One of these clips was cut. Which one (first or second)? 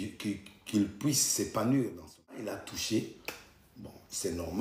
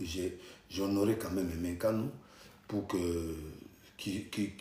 first